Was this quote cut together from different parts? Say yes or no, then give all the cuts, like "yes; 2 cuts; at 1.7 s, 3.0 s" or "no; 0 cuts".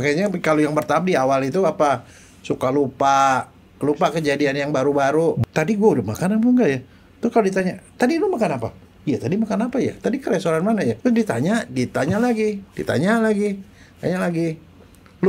yes; 2 cuts; at 5.4 s, 11.0 s